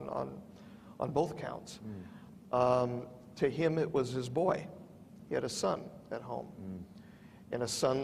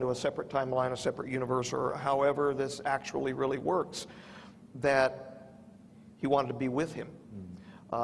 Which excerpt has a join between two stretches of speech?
first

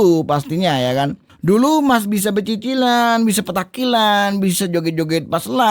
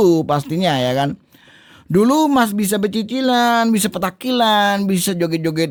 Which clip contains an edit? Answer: first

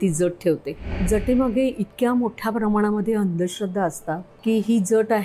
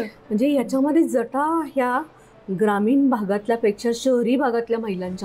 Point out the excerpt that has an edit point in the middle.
first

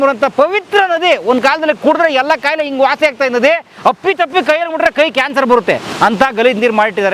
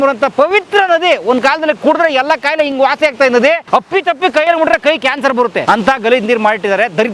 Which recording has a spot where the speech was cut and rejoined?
second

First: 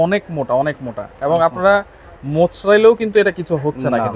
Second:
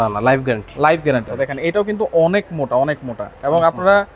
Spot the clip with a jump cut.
second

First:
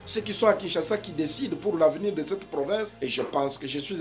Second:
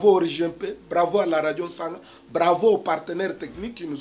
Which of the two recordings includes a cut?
first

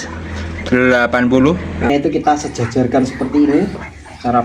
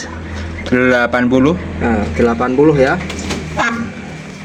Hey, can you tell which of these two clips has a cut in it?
first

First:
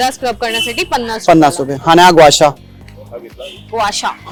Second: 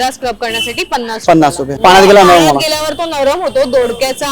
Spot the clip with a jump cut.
second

